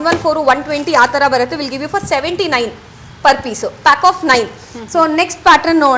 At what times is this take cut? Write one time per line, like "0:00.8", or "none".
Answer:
none